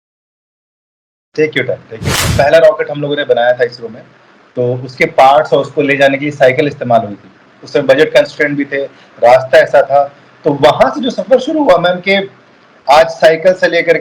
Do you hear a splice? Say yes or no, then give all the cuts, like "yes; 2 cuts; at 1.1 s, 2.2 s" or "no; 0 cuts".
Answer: yes; 1 cut; at 2.2 s